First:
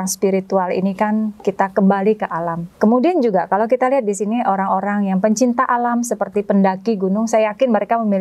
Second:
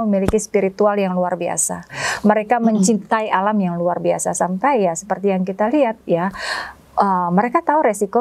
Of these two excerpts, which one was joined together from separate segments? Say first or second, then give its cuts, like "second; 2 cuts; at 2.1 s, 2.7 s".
first; 1 cut; at 2.6 s